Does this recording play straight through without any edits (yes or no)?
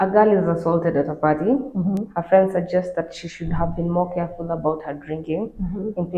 yes